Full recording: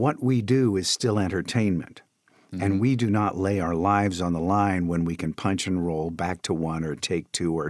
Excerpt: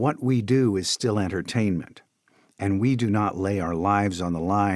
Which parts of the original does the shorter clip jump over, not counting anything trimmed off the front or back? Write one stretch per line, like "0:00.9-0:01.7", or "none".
none